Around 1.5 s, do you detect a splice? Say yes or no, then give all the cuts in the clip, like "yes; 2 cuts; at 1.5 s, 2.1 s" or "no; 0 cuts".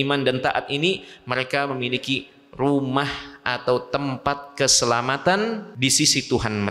no; 1 cut; at 5.7 s